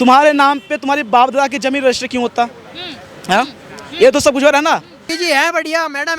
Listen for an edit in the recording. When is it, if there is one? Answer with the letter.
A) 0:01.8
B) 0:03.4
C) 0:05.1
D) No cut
C